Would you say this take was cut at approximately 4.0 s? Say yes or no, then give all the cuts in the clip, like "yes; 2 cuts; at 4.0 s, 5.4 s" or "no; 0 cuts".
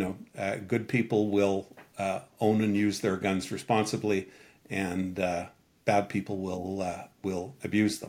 no; 0 cuts